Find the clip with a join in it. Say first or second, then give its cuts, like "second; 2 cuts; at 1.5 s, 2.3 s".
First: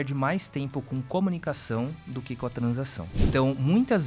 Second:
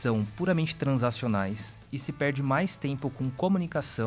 first; 1 cut; at 3.0 s